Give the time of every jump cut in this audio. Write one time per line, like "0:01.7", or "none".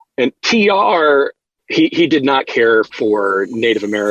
0:01.5
0:02.9